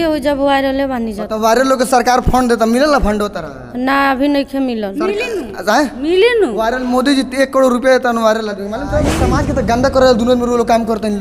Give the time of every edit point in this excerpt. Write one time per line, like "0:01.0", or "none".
0:09.4